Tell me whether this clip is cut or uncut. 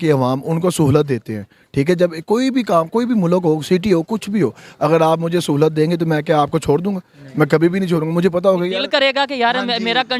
uncut